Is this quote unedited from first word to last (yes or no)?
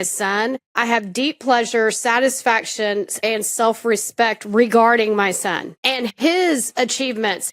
no